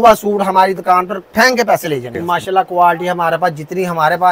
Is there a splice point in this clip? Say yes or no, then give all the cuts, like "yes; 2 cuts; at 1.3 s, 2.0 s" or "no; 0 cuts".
yes; 1 cut; at 2.1 s